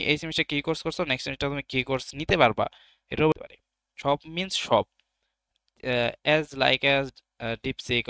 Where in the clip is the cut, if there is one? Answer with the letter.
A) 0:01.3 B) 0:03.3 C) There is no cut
B